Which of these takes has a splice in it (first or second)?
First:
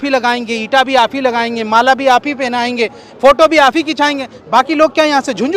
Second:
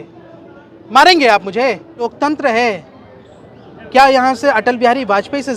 second